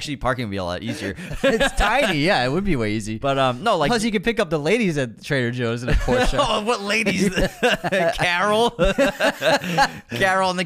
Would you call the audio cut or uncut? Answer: uncut